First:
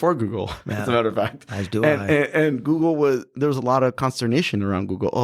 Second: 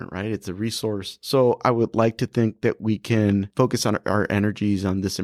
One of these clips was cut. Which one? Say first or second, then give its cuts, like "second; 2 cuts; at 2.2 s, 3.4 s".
second; 2 cuts; at 1.1 s, 3.5 s